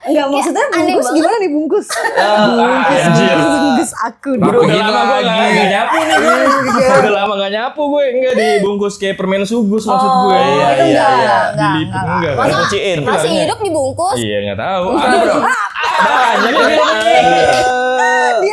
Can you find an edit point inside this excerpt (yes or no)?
no